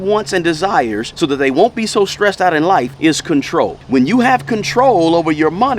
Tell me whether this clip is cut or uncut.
cut